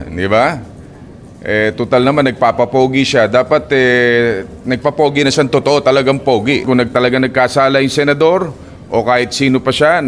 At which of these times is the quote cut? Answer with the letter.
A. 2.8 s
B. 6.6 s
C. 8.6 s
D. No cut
B